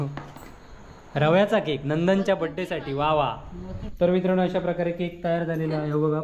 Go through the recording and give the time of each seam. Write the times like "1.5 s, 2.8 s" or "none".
3.9 s

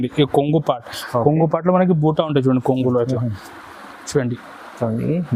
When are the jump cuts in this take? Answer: none

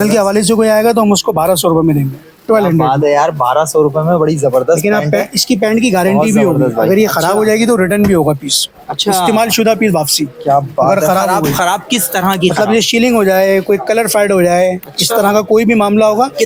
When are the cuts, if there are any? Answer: none

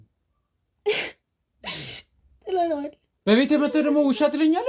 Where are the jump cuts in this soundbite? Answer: 3.1 s

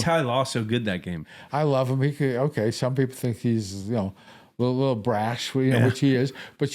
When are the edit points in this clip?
1.3 s

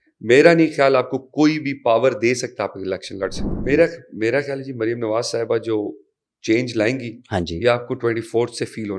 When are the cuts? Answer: 3.5 s

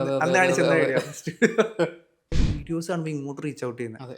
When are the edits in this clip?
2.5 s

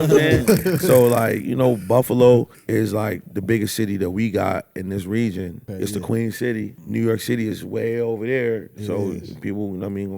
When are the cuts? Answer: 2.6 s, 5.6 s, 6.8 s

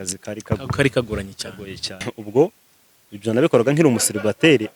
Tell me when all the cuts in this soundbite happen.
2.1 s

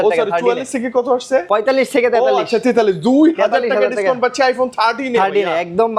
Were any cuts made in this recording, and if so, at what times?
none

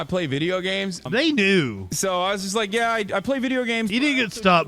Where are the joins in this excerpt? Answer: 1.0 s

